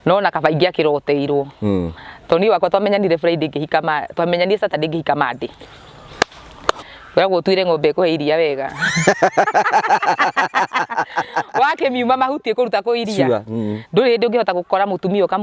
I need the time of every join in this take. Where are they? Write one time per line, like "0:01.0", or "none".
0:06.8